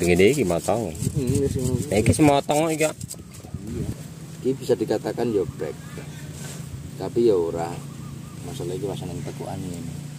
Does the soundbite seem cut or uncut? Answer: cut